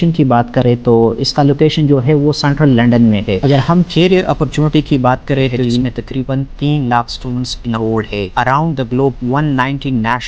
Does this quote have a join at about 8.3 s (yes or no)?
yes